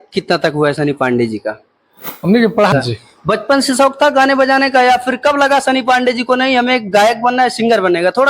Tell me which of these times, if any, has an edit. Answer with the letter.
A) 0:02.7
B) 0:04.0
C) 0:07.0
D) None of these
A